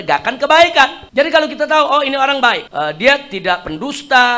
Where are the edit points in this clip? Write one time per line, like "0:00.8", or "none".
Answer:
none